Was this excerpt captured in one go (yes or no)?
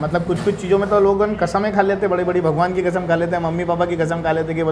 yes